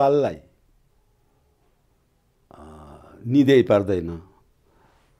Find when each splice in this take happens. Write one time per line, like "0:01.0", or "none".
none